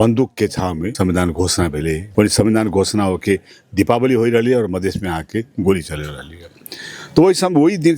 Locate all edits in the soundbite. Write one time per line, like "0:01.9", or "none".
0:00.9
0:02.1